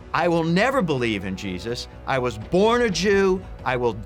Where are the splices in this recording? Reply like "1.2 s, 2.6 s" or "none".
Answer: none